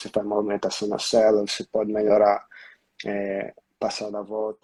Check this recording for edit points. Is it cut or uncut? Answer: uncut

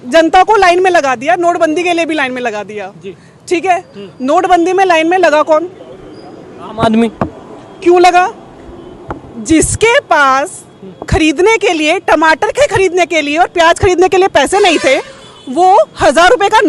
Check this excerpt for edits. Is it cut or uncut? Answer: uncut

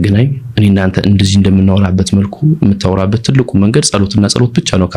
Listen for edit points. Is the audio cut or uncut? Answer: uncut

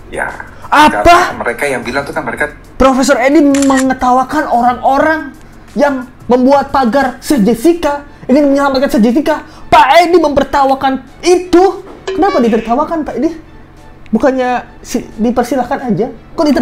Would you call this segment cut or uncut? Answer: uncut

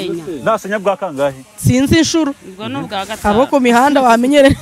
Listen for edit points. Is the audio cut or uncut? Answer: uncut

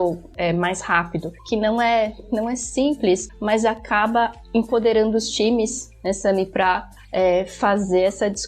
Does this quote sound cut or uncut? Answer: uncut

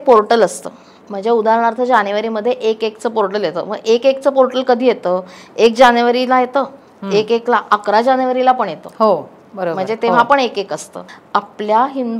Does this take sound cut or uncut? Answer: cut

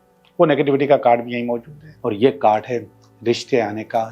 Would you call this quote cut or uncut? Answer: cut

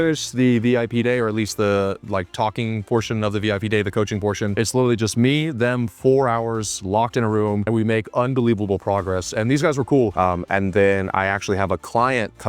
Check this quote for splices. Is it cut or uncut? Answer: cut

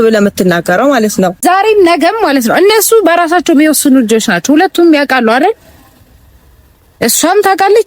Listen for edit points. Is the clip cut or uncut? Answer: cut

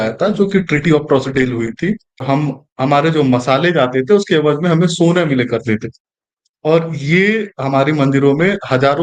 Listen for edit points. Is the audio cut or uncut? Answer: cut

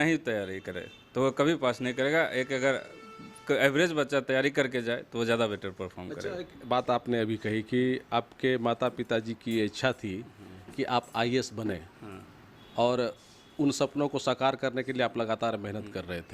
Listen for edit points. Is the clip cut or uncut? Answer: uncut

